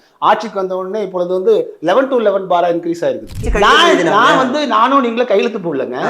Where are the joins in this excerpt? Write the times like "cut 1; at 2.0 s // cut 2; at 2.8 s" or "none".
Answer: cut 1; at 3.4 s